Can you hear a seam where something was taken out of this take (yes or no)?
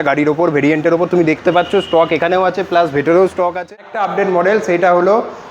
yes